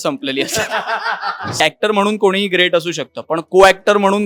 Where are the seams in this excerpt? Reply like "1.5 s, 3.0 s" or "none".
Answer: 1.6 s